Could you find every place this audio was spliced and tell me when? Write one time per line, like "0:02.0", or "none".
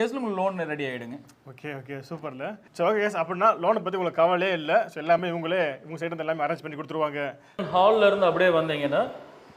0:07.6

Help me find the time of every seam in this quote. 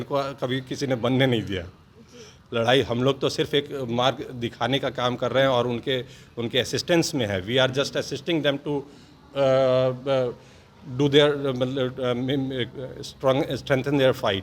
none

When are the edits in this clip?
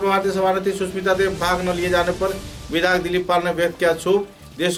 none

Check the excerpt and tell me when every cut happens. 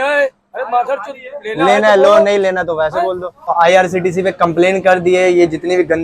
0:03.5

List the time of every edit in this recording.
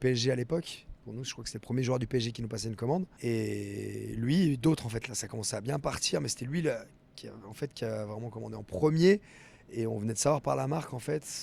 0:03.1

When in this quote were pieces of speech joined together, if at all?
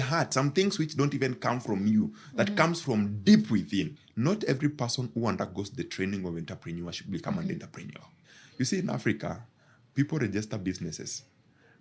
0:04.0
0:08.1

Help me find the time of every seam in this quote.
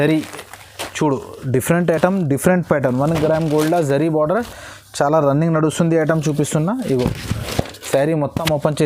none

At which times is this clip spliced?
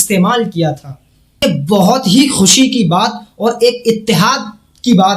0:01.4

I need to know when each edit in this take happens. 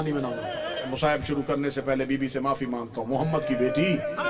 0:00.9

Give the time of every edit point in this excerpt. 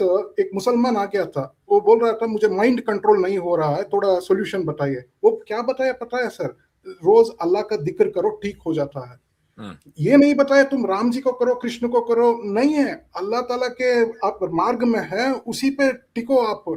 none

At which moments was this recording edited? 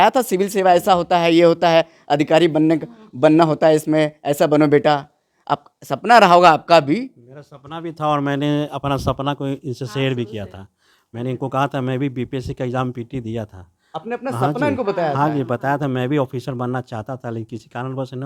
none

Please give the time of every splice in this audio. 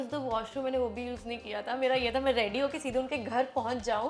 none

